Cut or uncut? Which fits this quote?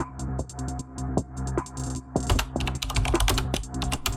uncut